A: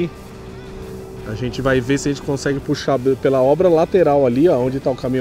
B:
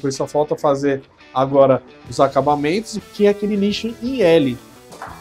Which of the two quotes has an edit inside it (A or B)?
B